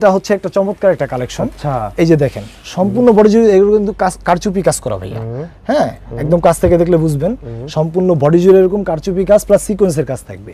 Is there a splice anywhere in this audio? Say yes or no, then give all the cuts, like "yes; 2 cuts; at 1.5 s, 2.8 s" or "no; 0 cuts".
no; 0 cuts